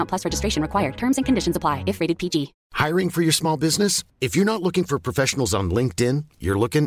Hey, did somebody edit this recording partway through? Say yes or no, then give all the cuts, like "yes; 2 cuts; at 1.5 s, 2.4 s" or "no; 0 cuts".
yes; 1 cut; at 2.6 s